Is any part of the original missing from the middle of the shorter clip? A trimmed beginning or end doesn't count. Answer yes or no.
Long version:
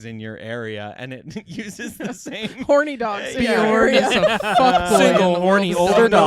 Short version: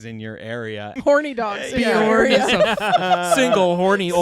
yes